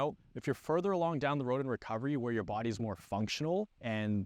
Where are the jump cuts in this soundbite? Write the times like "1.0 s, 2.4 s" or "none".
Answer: none